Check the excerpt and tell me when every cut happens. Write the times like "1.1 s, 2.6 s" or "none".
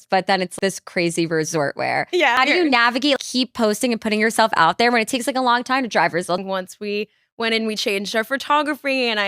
2.4 s, 6.4 s